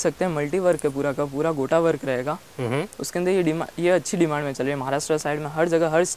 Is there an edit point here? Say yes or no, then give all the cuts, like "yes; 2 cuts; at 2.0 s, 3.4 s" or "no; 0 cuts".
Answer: no; 0 cuts